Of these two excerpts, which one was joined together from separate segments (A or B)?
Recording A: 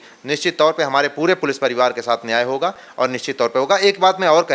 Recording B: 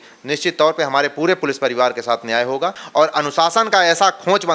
B